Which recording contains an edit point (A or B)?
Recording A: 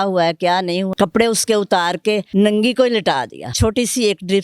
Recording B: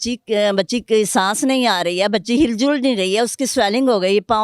A